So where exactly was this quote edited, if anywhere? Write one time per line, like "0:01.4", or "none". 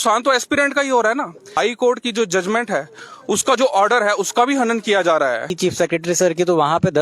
0:01.5
0:05.5